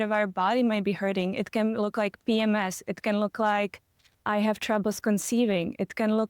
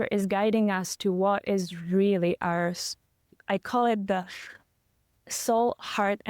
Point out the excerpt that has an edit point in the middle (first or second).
first